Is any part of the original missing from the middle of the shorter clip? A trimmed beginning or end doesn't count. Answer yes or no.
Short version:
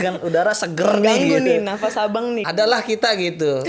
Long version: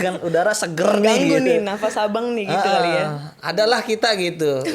yes